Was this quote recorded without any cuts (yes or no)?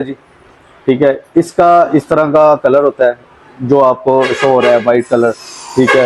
yes